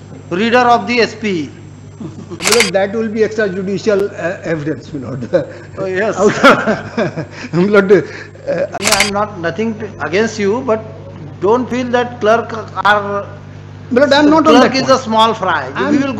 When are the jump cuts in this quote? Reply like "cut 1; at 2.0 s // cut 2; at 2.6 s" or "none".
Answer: cut 1; at 2.3 s // cut 2; at 8.8 s